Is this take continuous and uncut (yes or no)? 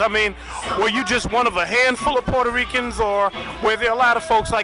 no